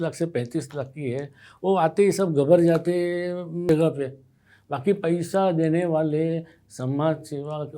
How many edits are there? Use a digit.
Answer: 1